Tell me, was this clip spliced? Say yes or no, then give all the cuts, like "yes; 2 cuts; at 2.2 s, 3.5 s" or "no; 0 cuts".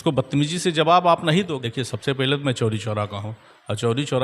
yes; 1 cut; at 1.5 s